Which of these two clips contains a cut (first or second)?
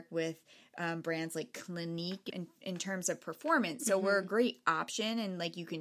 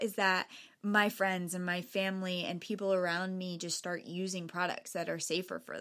first